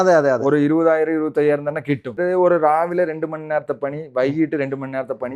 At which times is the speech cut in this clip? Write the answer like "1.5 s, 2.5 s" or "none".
2.2 s